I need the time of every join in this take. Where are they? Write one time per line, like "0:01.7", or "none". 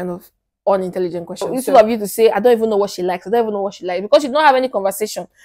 0:01.6